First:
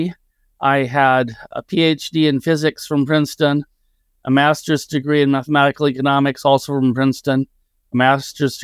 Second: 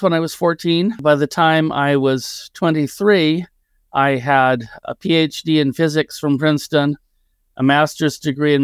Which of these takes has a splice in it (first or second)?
second